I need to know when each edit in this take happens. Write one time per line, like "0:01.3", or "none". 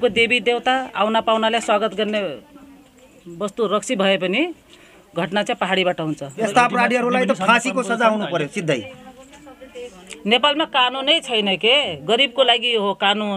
0:06.5